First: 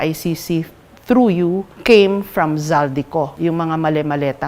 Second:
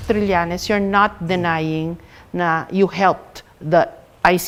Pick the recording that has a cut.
first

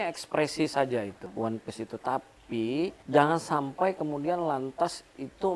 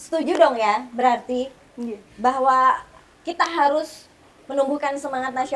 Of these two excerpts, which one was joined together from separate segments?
first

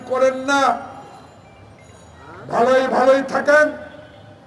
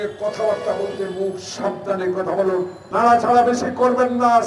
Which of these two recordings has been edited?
second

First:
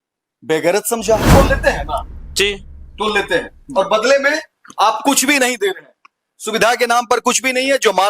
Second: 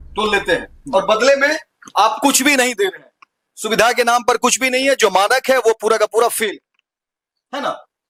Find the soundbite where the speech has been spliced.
first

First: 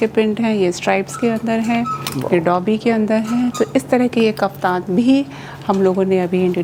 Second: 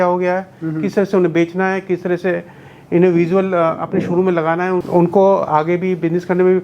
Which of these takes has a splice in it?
second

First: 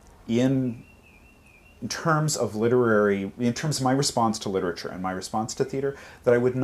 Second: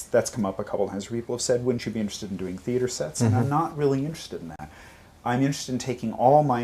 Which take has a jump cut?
second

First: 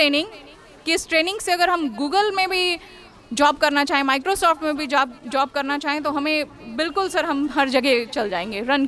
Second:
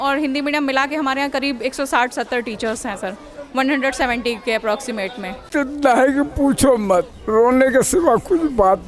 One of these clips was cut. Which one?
second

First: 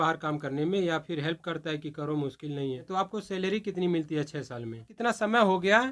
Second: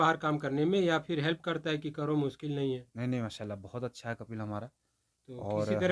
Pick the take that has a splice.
first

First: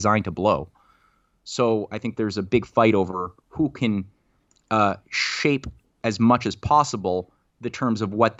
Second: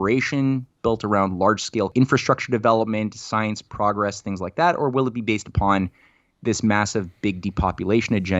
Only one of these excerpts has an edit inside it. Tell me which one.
second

